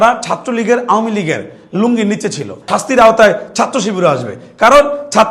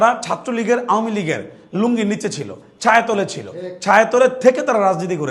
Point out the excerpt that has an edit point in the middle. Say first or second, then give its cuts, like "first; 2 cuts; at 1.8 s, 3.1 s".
first; 1 cut; at 2.7 s